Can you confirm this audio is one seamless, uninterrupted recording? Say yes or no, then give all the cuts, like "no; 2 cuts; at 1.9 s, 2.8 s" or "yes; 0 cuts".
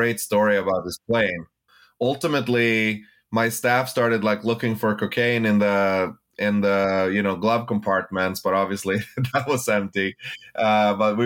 no; 1 cut; at 1.5 s